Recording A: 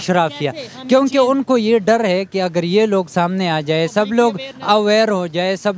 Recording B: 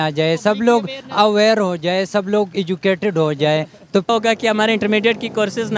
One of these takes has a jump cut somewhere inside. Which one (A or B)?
B